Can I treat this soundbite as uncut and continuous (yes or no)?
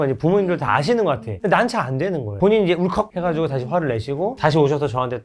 no